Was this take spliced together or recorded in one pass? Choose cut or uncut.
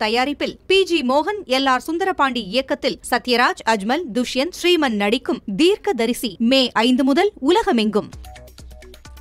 cut